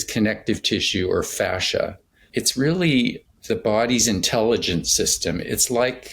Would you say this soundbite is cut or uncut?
cut